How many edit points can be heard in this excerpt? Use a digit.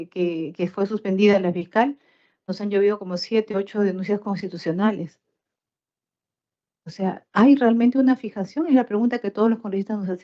0